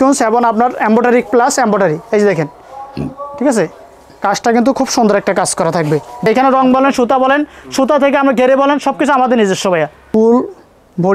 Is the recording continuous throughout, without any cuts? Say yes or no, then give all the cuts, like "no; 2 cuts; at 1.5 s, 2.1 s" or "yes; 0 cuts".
no; 2 cuts; at 6.2 s, 10.0 s